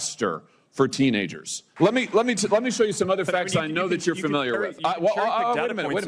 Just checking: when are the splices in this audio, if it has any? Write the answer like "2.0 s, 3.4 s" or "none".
1.7 s